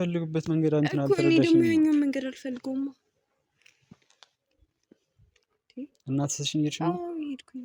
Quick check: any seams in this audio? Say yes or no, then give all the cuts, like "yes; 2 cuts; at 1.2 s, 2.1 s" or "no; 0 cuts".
no; 0 cuts